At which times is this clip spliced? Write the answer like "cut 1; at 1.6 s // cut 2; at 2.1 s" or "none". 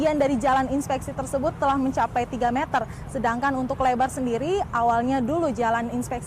cut 1; at 2.5 s